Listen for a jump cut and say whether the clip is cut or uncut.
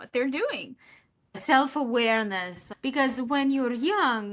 cut